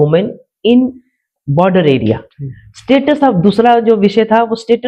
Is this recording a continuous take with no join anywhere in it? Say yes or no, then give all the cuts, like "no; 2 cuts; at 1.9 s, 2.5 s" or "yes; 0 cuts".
yes; 0 cuts